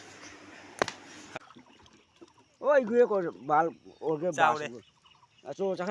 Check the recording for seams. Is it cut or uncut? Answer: cut